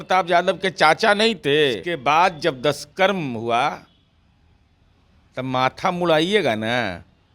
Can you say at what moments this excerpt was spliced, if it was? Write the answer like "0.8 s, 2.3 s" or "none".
1.9 s